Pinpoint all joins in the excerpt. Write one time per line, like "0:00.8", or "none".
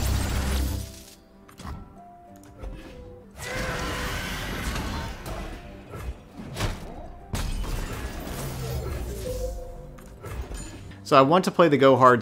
0:03.3
0:10.9